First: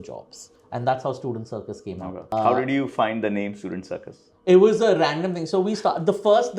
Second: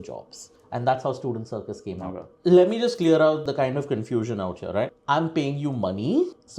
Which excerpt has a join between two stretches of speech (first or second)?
second